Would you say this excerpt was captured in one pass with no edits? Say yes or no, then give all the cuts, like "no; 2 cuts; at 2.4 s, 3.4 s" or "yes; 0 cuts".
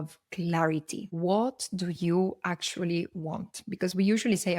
yes; 0 cuts